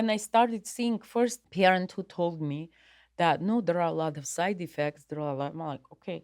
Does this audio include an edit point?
yes; 1 cut; at 1.4 s

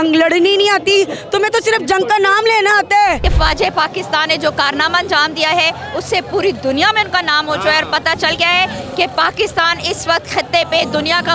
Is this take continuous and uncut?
no; 1 cut; at 3.3 s

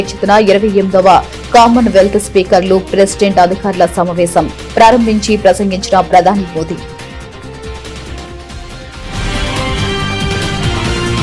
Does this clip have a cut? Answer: no; 0 cuts

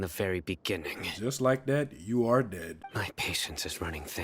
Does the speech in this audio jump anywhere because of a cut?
yes; 1 cut; at 2.8 s

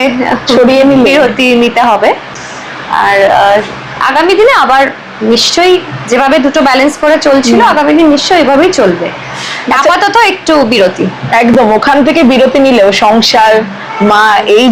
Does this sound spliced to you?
no; 0 cuts

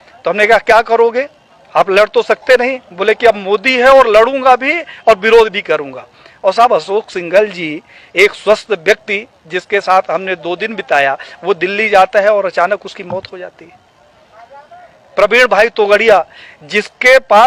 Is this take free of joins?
yes; 0 cuts

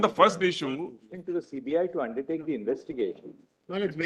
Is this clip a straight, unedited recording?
no; 1 cut; at 1.0 s

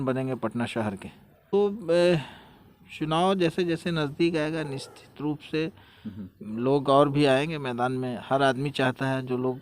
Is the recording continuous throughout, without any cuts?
no; 1 cut; at 1.5 s

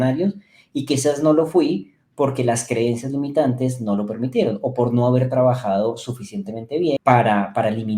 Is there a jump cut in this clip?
yes; 1 cut; at 7.0 s

